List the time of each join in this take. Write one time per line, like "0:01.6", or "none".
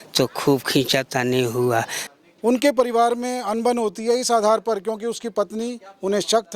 0:02.0